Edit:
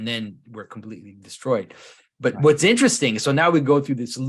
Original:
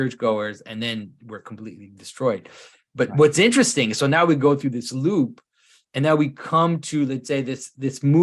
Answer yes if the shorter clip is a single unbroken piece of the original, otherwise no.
yes